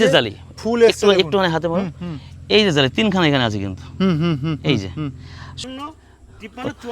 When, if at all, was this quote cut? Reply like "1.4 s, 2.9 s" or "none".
5.6 s